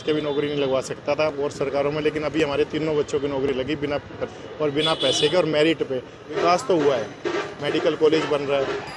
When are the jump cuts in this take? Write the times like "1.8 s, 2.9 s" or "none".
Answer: 4.3 s, 6.2 s